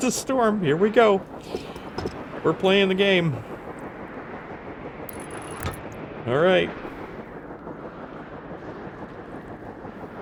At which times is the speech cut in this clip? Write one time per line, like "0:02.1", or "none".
none